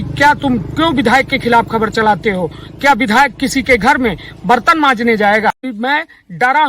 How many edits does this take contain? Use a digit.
1